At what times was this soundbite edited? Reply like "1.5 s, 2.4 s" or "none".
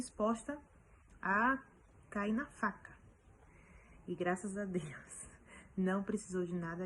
none